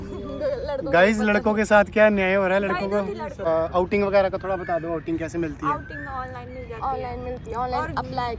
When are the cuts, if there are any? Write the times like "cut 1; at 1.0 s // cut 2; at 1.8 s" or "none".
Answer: cut 1; at 3.5 s